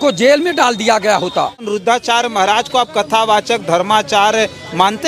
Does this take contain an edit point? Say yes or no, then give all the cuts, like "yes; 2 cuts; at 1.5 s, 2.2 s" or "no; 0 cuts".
yes; 1 cut; at 1.7 s